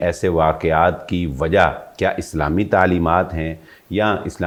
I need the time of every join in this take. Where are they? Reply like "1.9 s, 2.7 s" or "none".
none